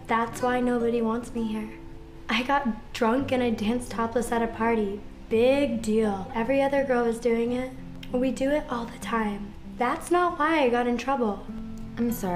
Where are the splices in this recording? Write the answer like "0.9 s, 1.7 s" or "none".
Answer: 1.0 s